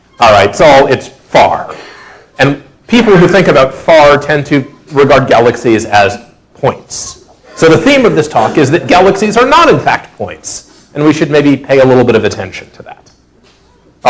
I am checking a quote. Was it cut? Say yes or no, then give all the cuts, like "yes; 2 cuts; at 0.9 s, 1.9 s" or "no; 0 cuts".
yes; 1 cut; at 8.3 s